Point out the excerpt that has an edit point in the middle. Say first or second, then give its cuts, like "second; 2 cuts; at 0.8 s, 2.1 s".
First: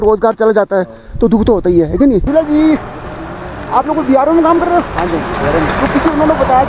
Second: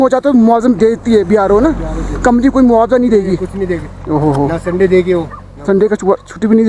first; 1 cut; at 2.2 s